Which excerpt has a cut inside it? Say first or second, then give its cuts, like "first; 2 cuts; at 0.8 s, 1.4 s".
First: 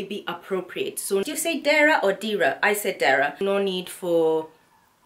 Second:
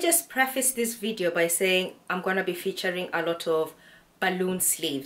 first; 2 cuts; at 1.2 s, 3.4 s